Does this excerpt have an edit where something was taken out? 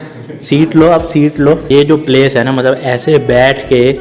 yes; 1 cut; at 1.6 s

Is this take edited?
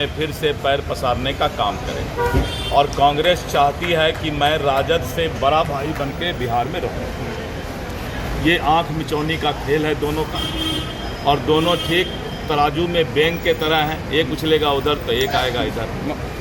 no; 0 cuts

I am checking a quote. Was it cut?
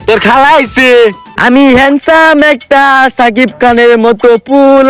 yes; 1 cut; at 1.3 s

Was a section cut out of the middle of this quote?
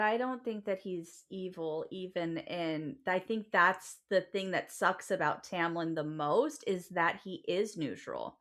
no; 0 cuts

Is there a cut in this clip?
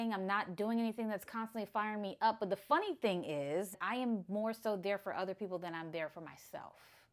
yes; 1 cut; at 3.8 s

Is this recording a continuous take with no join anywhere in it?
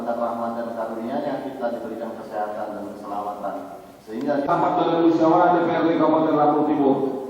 no; 1 cut; at 4.5 s

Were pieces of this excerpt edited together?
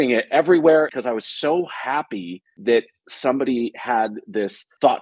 yes; 1 cut; at 0.9 s

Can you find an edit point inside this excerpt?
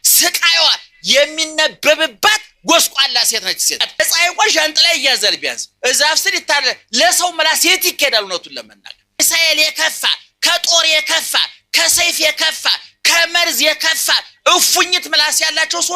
yes; 2 cuts; at 4.0 s, 9.2 s

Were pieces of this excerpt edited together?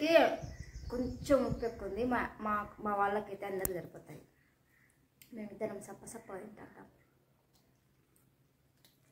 no; 0 cuts

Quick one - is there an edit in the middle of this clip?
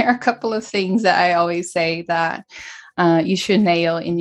no; 0 cuts

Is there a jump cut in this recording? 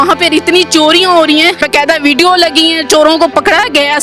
yes; 1 cut; at 1.6 s

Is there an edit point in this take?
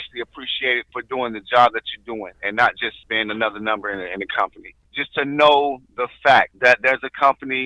yes; 1 cut; at 4.8 s

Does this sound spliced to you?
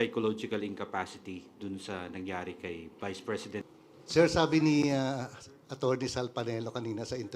yes; 1 cut; at 3.7 s

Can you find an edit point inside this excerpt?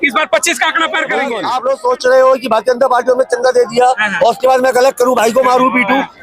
yes; 1 cut; at 1.4 s

